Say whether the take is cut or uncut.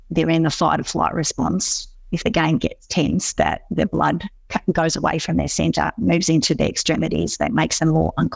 uncut